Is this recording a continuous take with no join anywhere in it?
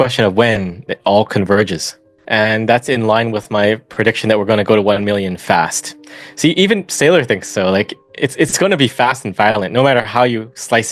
no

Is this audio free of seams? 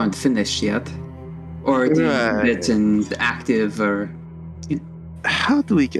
yes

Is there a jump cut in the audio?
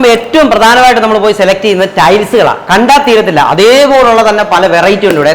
no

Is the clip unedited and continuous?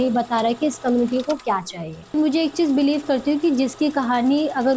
no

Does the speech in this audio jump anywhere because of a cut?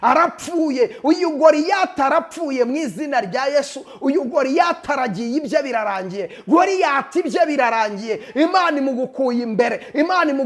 no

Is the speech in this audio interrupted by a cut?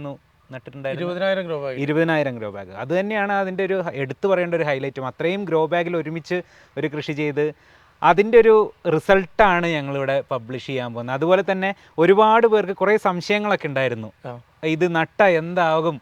no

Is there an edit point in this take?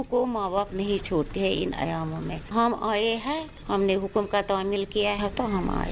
yes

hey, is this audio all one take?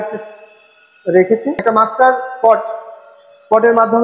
no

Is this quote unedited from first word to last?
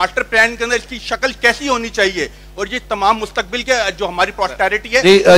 yes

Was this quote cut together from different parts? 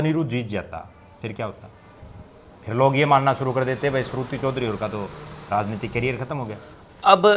no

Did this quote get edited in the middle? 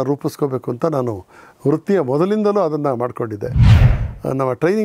yes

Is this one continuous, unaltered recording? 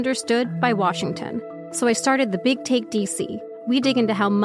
no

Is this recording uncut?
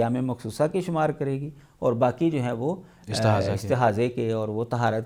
yes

